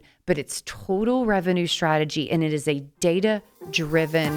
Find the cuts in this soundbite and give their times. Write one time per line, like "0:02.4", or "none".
none